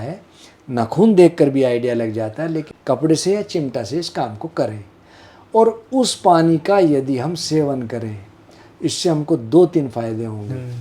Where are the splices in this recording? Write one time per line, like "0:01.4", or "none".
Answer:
0:02.7